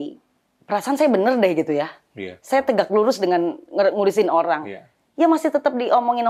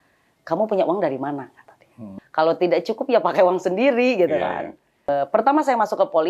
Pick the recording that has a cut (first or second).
second